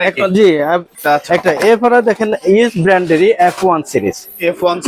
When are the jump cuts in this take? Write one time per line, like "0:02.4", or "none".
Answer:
0:00.9

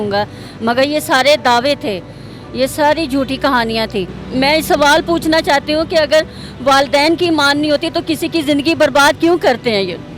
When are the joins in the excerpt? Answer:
0:04.2

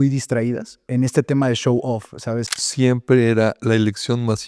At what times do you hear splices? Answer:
0:00.9
0:02.5

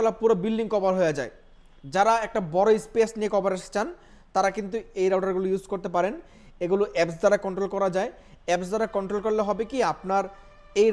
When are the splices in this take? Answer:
none

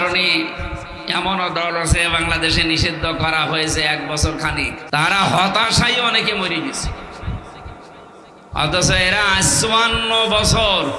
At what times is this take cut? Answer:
0:04.8

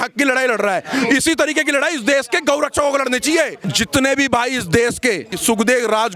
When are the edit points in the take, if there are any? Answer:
0:03.6
0:05.3

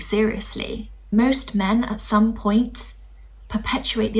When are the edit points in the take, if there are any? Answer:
0:01.1

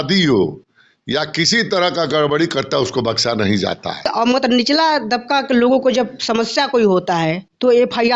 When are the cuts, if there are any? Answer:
0:04.1

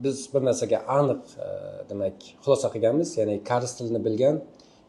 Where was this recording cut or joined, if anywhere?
none

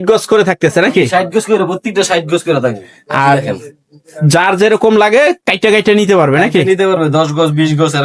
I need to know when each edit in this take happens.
none

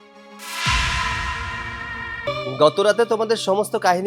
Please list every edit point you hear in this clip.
0:02.3

